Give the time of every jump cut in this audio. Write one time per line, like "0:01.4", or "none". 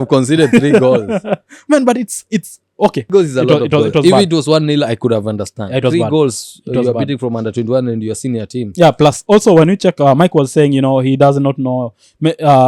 0:03.1